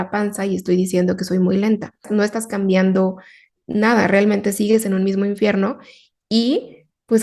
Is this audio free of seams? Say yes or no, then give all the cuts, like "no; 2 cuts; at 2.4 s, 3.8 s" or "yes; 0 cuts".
no; 1 cut; at 2.1 s